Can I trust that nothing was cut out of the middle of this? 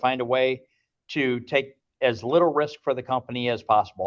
yes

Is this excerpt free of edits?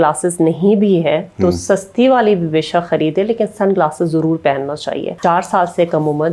no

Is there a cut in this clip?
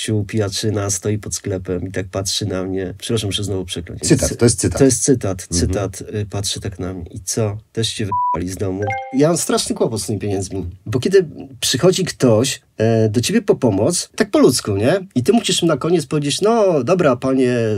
yes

